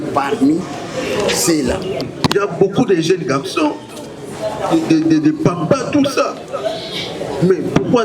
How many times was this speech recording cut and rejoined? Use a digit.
1